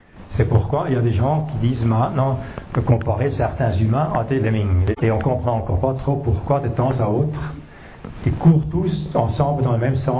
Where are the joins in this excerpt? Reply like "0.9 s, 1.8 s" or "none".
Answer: 4.8 s